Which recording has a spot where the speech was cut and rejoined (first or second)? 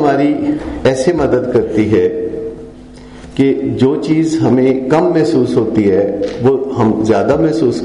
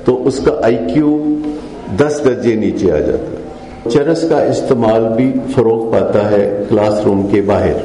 second